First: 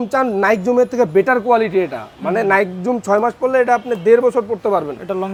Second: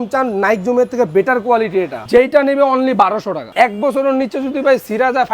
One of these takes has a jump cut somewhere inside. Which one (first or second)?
second